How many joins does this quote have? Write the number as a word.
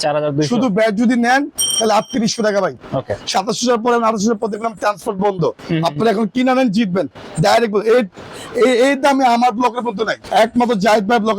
two